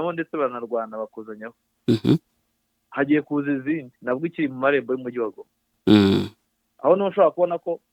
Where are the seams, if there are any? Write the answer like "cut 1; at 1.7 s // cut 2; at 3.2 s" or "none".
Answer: none